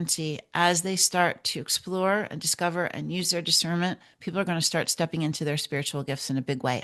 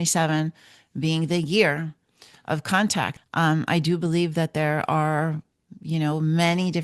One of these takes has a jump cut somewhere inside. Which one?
second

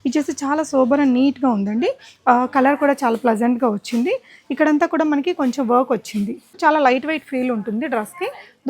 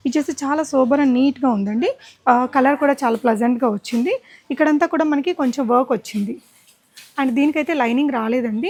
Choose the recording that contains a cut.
first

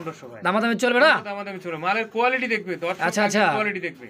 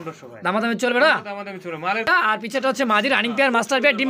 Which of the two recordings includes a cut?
second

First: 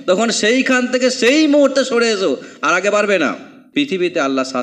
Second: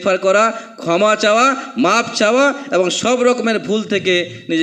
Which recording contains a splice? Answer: first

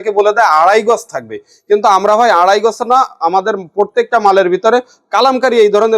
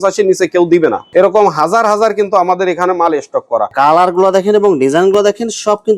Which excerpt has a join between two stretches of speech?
second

